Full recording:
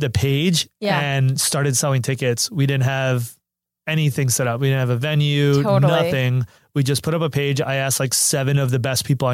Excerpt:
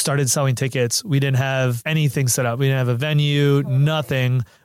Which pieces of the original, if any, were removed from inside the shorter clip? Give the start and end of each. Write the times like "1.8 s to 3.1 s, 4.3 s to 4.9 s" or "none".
3.3 s to 3.8 s